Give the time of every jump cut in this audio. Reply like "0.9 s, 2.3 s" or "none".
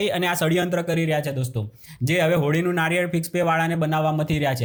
none